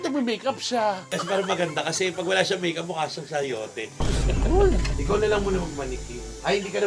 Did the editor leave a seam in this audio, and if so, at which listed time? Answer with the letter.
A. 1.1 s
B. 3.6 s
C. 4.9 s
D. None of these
C